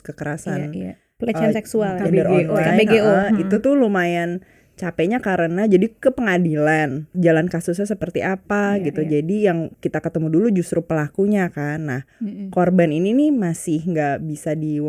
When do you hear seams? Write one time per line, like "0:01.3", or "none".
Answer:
0:07.0